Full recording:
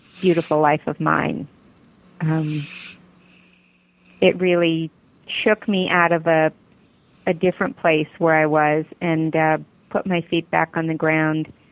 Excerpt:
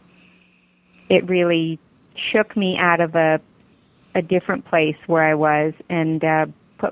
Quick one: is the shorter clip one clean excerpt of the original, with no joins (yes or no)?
yes